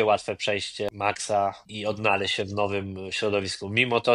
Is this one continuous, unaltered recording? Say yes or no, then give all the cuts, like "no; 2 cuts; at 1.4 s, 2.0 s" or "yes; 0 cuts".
no; 2 cuts; at 0.9 s, 1.7 s